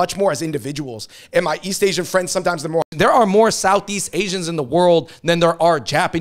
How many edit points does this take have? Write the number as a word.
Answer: one